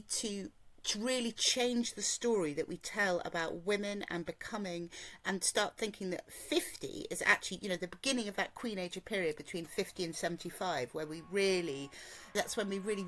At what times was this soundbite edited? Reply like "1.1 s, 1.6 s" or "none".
none